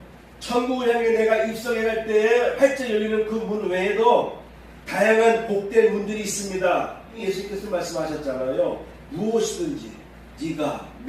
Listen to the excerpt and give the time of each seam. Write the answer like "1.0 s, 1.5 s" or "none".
7.1 s